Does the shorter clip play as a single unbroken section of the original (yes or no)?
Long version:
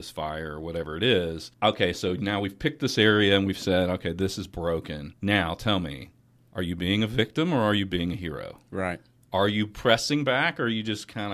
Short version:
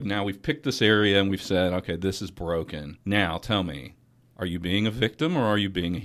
yes